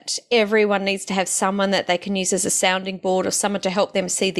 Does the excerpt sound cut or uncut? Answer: uncut